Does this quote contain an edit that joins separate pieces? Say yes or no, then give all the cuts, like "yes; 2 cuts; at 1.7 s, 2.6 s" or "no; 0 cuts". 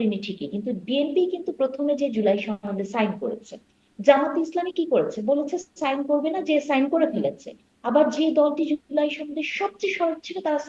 no; 0 cuts